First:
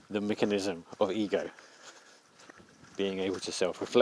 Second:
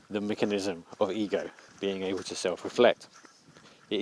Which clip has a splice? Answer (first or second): second